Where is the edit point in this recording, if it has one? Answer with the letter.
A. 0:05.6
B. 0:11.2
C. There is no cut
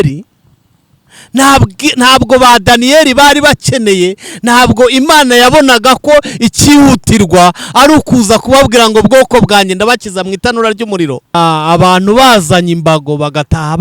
B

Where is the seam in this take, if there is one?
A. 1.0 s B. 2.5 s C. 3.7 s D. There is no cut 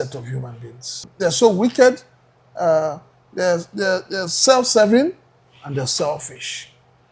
A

